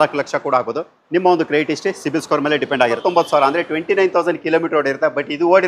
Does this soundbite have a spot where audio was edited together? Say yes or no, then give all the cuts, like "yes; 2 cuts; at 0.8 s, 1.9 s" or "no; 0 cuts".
yes; 1 cut; at 3.0 s